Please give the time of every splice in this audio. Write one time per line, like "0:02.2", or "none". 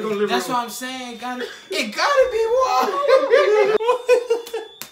0:03.8